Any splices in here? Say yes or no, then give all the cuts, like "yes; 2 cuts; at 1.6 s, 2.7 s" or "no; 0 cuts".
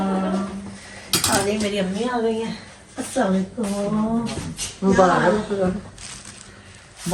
no; 0 cuts